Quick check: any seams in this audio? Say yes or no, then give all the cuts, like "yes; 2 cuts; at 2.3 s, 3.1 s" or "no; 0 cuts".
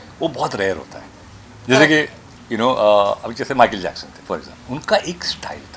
no; 0 cuts